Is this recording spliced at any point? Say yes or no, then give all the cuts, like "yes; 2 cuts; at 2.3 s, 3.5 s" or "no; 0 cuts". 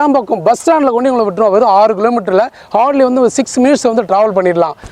no; 0 cuts